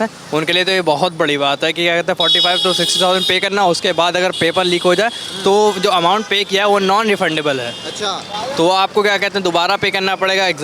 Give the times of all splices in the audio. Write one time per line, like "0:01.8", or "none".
none